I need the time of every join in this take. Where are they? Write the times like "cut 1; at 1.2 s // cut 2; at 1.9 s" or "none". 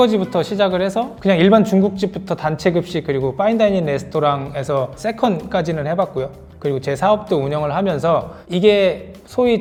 none